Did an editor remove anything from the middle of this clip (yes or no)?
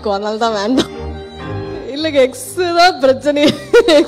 yes